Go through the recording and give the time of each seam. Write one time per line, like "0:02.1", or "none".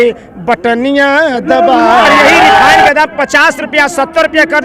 0:02.9